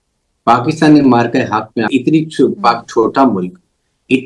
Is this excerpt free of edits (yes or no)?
no